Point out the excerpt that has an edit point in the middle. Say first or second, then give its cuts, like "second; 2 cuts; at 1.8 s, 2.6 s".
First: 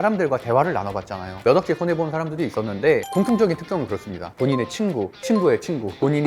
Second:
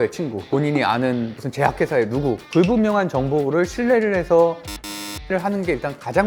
first; 2 cuts; at 1.4 s, 4.2 s